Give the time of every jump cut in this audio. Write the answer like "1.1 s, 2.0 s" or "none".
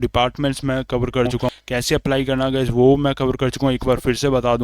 1.5 s